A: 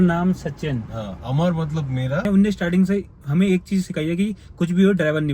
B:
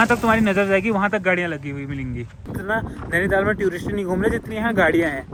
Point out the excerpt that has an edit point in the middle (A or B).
A